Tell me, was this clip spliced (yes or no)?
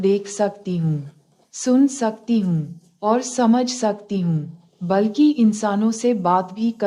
no